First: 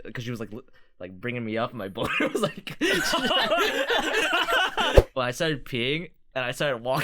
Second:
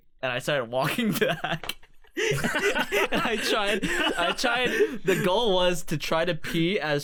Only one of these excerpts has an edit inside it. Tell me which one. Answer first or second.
first